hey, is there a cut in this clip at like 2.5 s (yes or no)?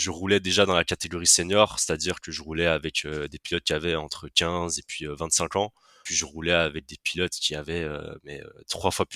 no